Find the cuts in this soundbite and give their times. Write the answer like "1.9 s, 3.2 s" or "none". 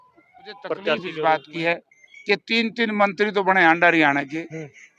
1.1 s